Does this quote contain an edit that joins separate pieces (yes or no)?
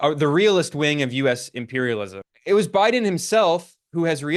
yes